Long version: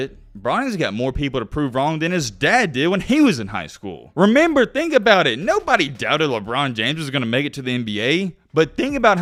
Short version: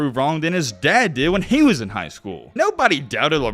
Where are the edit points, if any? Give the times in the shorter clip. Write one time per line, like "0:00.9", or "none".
0:02.5